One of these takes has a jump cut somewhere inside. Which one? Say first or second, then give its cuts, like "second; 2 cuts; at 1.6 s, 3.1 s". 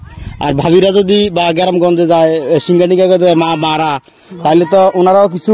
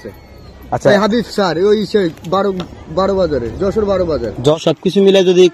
second; 1 cut; at 4.5 s